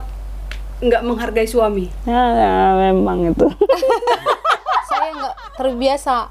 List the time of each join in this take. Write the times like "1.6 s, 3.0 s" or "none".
5.4 s